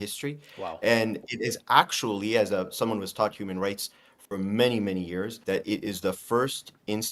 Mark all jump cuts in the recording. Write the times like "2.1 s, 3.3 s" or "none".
5.4 s